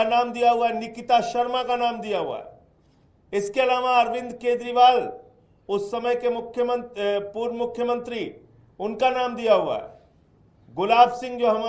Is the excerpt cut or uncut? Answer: uncut